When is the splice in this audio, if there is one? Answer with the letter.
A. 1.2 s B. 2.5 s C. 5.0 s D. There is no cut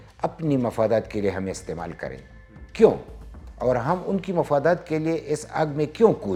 D